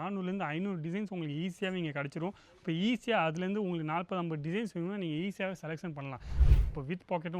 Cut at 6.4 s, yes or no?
yes